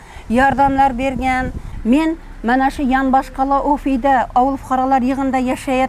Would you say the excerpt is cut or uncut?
cut